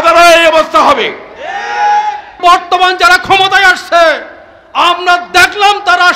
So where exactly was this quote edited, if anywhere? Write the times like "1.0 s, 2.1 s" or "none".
2.4 s